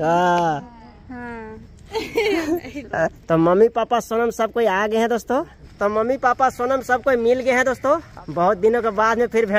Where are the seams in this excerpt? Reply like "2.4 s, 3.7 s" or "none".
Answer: 1.0 s, 3.2 s, 5.6 s, 8.1 s

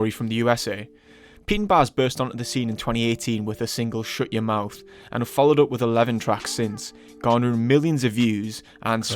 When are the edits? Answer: 2.8 s

